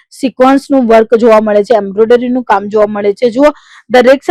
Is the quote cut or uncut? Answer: uncut